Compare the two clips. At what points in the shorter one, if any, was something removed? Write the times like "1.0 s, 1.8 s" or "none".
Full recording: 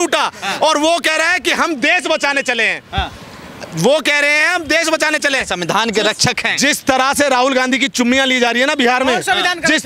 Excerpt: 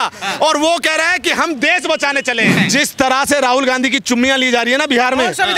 2.6 s